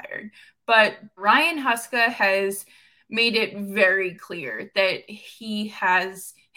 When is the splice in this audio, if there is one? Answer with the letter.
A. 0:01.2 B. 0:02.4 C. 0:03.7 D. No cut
A